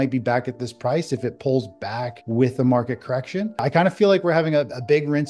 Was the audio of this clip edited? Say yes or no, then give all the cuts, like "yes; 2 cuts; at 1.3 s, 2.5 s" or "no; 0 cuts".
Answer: yes; 2 cuts; at 2.1 s, 3.6 s